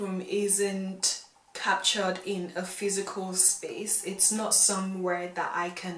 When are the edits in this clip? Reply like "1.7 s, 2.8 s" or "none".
none